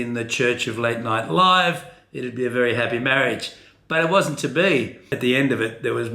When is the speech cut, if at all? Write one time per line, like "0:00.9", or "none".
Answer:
0:05.1